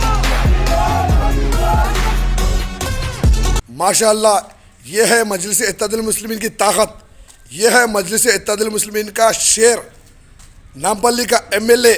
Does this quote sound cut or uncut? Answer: cut